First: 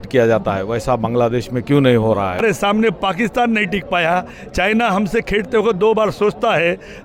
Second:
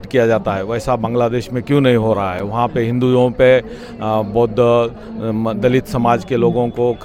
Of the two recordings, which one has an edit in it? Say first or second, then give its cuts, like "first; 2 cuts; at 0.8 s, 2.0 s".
first; 1 cut; at 2.4 s